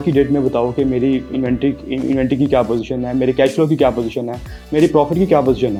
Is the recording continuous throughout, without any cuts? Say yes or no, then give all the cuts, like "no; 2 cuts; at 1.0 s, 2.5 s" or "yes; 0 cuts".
yes; 0 cuts